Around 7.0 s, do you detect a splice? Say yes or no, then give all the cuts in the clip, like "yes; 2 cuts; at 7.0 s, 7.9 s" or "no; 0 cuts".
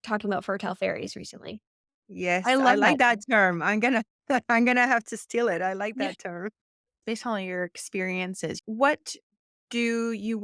yes; 1 cut; at 7.0 s